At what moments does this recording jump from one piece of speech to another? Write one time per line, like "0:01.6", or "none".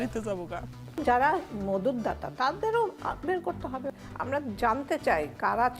0:01.0
0:03.9